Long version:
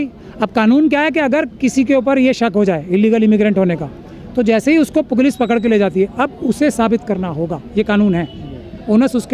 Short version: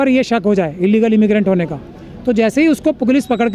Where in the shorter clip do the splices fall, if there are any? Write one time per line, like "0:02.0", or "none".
none